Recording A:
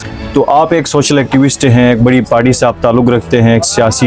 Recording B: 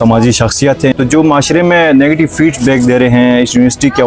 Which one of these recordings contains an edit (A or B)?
B